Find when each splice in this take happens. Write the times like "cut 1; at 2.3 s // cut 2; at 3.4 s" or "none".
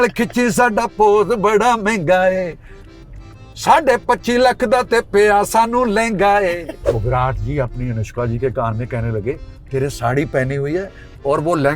cut 1; at 6.8 s